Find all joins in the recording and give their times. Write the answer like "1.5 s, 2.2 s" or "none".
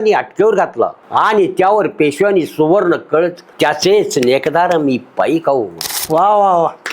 1.0 s, 3.4 s